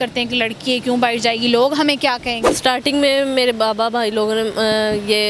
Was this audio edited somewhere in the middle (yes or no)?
yes